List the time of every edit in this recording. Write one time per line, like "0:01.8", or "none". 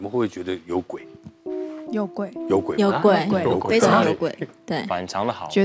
none